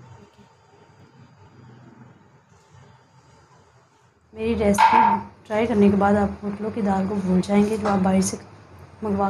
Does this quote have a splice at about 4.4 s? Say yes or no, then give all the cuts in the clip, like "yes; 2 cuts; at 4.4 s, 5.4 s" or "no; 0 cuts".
yes; 1 cut; at 4.4 s